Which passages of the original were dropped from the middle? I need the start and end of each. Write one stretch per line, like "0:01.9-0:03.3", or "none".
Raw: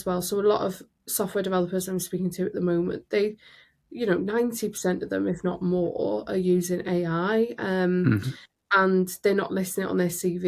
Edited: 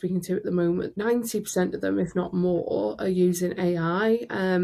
0:03.1-0:04.3